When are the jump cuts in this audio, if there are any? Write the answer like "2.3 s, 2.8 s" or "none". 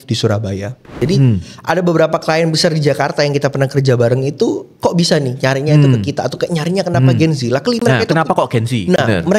0.9 s